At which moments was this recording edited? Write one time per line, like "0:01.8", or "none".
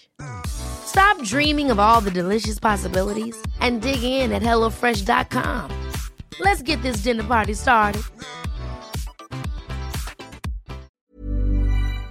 0:10.9